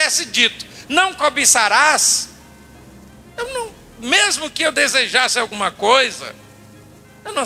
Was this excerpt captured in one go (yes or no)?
yes